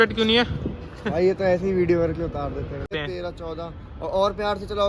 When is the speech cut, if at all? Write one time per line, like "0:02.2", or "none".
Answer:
0:02.9